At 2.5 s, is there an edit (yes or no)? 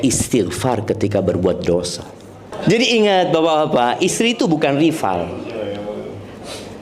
yes